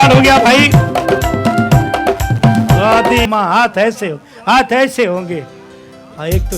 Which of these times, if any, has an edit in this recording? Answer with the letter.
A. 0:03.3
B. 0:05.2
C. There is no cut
A